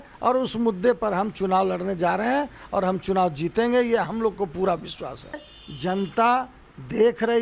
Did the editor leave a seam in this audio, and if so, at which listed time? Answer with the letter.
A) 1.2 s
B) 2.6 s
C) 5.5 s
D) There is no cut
C